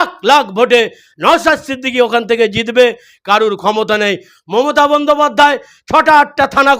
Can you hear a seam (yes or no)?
no